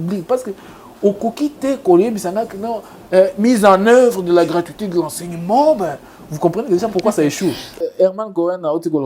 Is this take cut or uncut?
cut